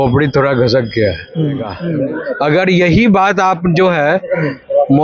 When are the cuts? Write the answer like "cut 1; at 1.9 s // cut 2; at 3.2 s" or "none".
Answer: none